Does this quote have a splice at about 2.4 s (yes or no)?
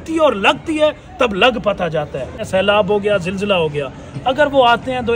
yes